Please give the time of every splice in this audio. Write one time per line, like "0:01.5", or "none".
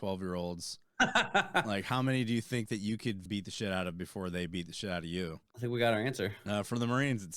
0:03.2
0:05.5